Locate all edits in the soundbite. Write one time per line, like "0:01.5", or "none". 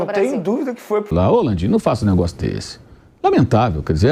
0:01.1